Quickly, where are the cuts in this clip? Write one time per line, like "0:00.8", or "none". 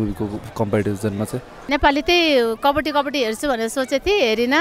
none